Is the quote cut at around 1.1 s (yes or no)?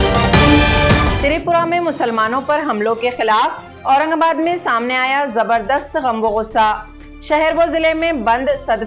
yes